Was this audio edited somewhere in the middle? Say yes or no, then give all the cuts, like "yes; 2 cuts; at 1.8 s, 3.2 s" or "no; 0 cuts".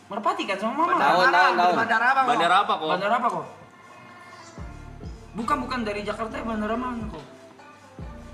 no; 0 cuts